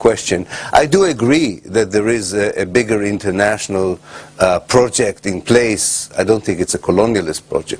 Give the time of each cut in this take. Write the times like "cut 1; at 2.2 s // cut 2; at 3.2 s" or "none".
cut 1; at 6.0 s